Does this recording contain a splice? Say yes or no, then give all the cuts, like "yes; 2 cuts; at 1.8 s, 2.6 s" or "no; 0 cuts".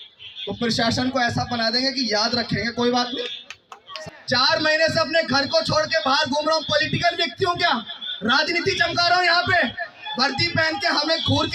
yes; 1 cut; at 3.9 s